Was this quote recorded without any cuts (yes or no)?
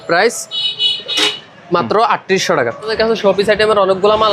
no